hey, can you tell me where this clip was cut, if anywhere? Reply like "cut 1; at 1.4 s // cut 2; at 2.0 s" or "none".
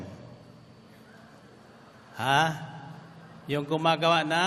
none